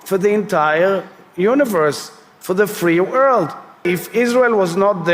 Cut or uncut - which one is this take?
cut